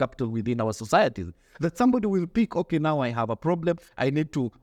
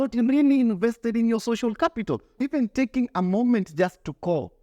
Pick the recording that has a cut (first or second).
second